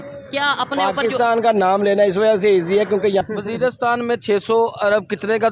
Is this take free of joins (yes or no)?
no